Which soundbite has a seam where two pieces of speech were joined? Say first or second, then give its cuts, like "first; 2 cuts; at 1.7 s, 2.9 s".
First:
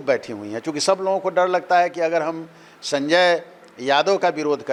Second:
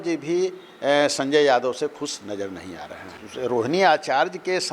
second; 1 cut; at 2.7 s